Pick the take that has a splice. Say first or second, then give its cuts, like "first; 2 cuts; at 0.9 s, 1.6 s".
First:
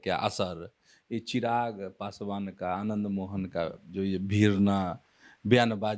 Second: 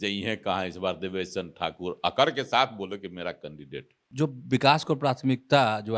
second; 1 cut; at 4.0 s